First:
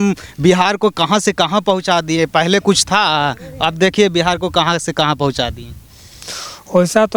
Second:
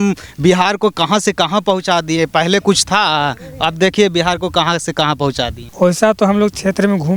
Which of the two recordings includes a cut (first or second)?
second